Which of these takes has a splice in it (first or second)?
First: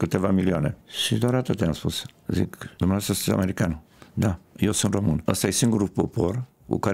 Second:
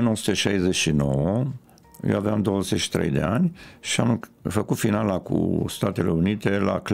first